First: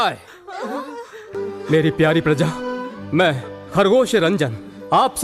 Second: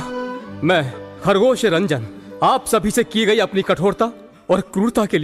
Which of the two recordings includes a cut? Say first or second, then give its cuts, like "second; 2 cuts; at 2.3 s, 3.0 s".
first; 1 cut; at 1.3 s